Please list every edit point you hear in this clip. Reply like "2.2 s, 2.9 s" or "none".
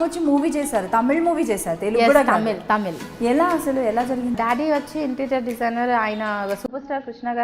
4.3 s